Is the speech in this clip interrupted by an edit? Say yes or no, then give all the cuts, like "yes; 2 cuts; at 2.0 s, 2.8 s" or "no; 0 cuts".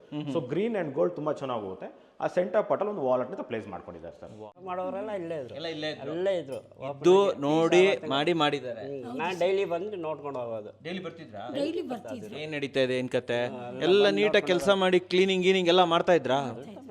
yes; 1 cut; at 4.6 s